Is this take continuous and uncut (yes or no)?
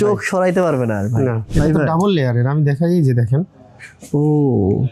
no